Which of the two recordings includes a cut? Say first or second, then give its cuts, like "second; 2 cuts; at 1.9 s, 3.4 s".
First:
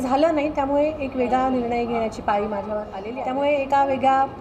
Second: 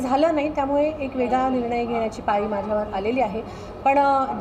first; 1 cut; at 3.0 s